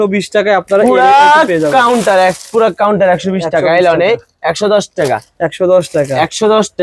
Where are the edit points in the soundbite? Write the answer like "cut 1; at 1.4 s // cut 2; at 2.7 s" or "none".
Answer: none